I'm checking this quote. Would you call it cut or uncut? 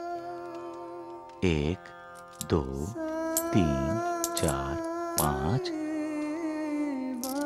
uncut